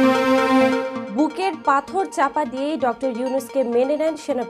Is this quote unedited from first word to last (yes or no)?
no